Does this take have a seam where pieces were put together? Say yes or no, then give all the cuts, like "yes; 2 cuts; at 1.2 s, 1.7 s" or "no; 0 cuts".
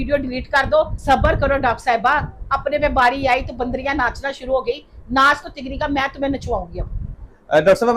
yes; 2 cuts; at 1.0 s, 7.0 s